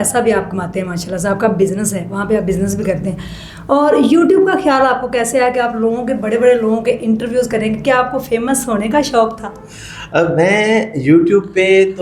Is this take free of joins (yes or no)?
yes